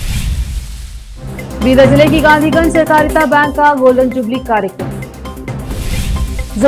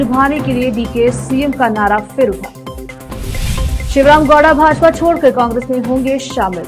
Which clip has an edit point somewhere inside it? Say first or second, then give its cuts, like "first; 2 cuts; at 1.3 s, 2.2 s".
first; 1 cut; at 1.1 s